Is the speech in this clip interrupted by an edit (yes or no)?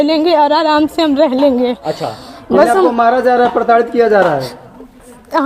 no